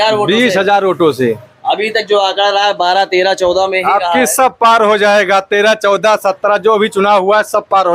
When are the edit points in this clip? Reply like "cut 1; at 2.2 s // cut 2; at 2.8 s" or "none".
none